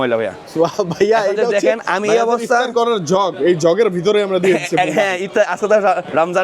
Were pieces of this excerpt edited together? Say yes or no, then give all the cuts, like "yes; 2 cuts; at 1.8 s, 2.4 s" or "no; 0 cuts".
no; 0 cuts